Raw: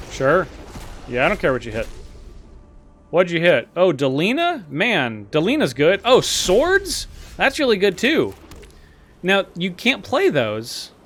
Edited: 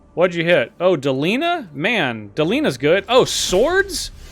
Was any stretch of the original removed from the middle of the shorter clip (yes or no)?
no